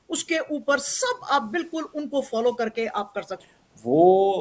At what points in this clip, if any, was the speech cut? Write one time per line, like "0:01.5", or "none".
0:03.2